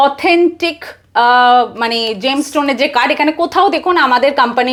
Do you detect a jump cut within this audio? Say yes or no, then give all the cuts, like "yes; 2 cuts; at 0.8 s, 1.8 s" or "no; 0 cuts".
no; 0 cuts